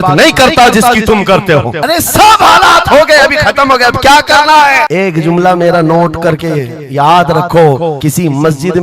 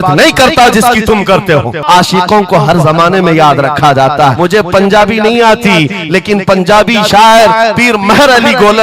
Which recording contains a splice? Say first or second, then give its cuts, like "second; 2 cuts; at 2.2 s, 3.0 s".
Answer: second; 2 cuts; at 1.8 s, 4.4 s